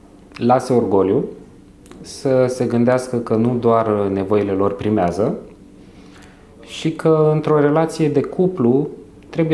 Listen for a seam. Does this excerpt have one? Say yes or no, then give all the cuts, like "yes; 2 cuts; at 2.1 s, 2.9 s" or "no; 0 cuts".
no; 0 cuts